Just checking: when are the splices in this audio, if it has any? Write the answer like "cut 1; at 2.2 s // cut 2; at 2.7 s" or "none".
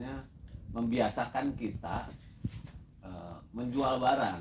none